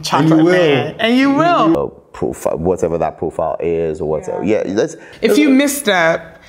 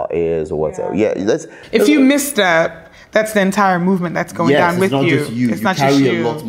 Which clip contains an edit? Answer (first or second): first